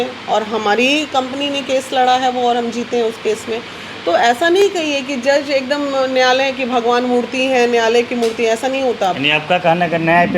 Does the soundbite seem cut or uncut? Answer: uncut